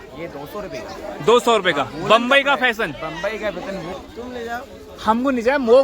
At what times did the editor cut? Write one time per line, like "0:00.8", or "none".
0:03.9